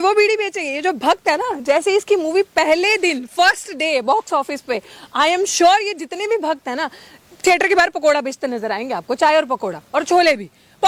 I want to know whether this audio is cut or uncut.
uncut